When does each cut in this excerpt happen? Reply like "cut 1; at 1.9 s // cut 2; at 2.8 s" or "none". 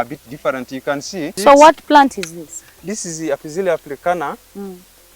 cut 1; at 1.3 s